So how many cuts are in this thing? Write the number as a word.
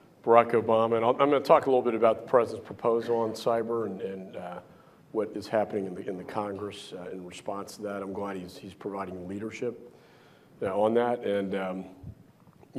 one